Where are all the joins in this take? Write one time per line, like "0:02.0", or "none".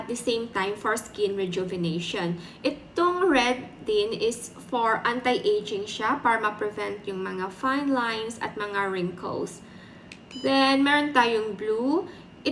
none